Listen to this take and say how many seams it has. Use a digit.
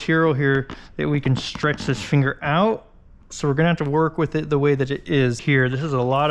1